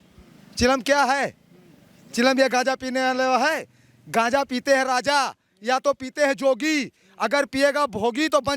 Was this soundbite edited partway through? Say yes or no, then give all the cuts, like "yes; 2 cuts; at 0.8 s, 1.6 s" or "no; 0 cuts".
no; 0 cuts